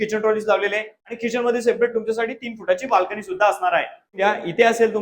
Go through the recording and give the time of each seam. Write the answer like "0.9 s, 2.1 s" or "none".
0.9 s, 4.2 s